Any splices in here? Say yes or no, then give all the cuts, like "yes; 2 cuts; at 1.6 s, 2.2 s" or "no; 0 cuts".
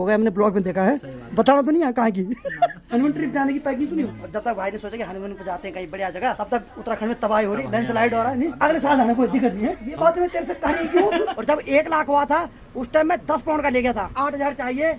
yes; 8 cuts; at 1.1 s, 2.8 s, 4.1 s, 6.4 s, 8.5 s, 9.8 s, 11.4 s, 14.1 s